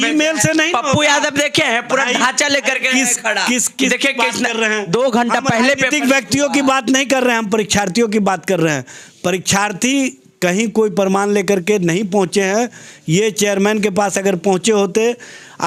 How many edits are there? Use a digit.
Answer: 0